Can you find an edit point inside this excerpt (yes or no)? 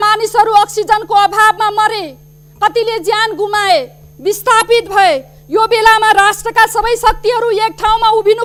no